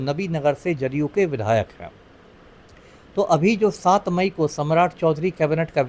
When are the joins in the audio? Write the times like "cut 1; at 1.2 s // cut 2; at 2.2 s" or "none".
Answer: none